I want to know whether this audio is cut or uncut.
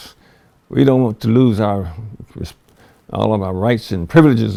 uncut